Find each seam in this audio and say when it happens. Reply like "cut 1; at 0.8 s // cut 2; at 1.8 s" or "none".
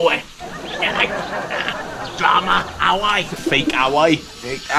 cut 1; at 3.3 s

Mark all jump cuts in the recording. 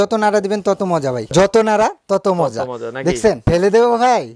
cut 1; at 1.2 s // cut 2; at 3.4 s

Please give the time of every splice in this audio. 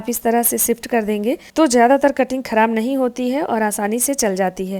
none

